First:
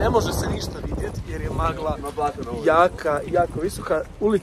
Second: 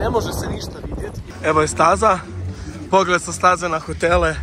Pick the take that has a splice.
second; 1 cut; at 1.2 s

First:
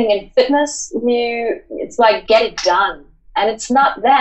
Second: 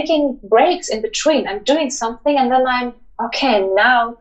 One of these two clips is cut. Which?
first; 1 cut; at 2.2 s

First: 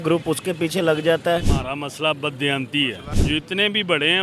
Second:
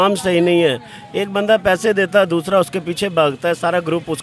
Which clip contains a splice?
first; 2 cuts; at 1.6 s, 3.1 s

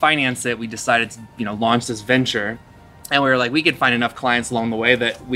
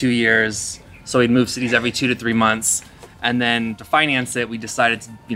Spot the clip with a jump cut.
first; 1 cut; at 2.6 s

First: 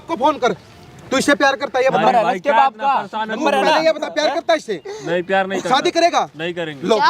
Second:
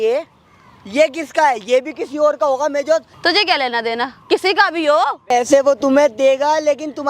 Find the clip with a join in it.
second; 2 cuts; at 3.1 s, 5.3 s

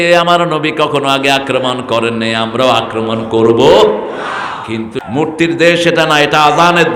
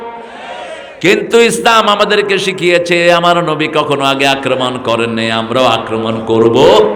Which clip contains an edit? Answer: first; 1 cut; at 5.0 s

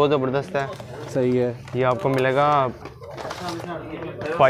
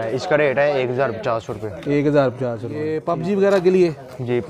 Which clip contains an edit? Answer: second; 1 cut; at 2.9 s

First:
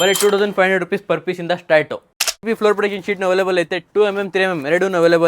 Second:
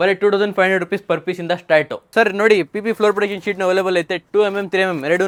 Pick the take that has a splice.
first; 1 cut; at 2.2 s

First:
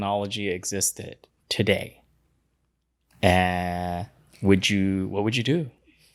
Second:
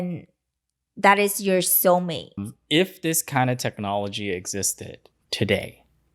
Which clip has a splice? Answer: second; 1 cut; at 2.5 s

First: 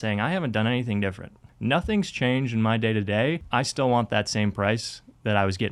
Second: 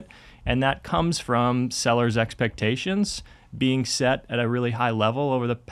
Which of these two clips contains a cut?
first; 2 cuts; at 1.5 s, 3.4 s

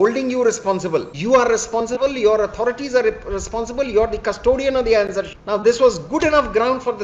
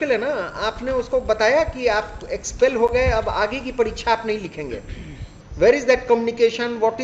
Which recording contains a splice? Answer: first; 2 cuts; at 1.1 s, 5.4 s

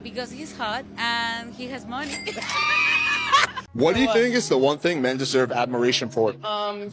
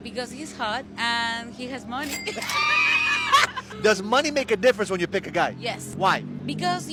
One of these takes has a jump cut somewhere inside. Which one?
first; 1 cut; at 3.7 s

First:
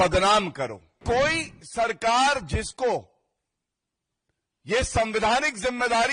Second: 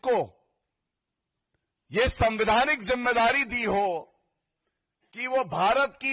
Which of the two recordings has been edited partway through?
first; 1 cut; at 0.9 s

